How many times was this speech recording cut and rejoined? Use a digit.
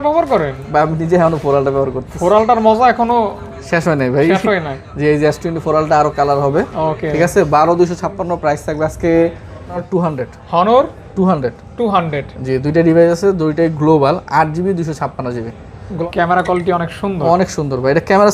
2